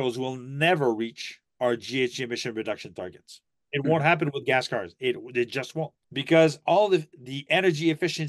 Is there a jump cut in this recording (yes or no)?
yes